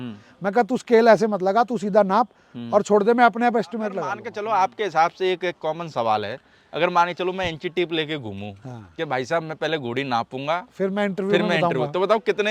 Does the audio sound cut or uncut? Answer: cut